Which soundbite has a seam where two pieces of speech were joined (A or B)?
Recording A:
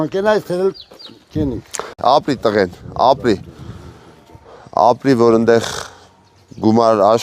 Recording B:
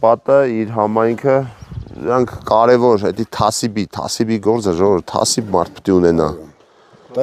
A